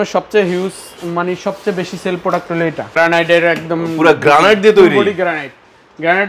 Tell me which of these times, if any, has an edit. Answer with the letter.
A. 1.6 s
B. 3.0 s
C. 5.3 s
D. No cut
B